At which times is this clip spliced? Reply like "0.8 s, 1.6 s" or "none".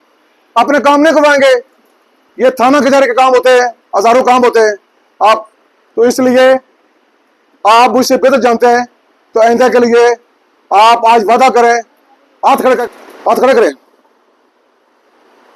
12.8 s